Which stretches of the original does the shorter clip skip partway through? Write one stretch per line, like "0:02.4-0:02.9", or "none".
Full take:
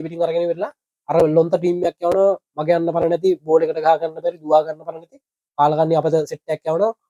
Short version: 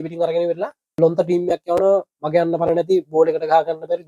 0:01.0-0:01.3